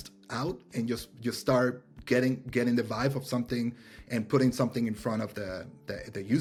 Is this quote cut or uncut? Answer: uncut